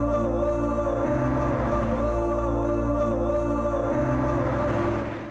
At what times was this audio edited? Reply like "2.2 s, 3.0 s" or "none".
none

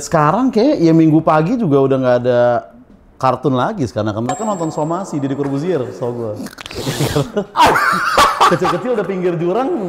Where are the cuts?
none

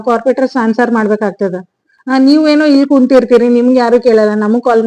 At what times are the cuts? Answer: none

